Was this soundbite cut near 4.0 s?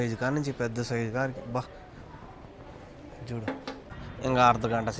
yes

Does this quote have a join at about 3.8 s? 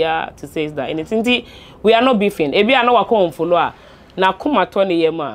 no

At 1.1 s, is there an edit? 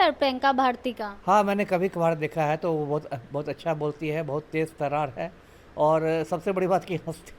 yes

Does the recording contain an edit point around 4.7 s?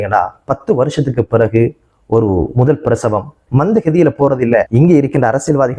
yes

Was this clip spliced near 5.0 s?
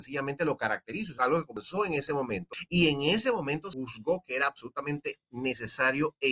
no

